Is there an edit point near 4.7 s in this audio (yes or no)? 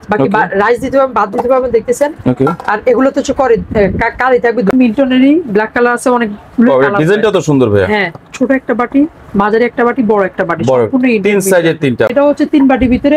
yes